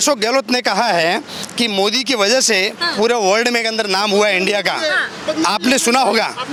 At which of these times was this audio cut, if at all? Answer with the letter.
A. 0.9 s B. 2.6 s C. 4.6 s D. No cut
D